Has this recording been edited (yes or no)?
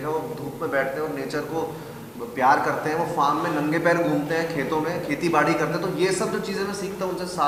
no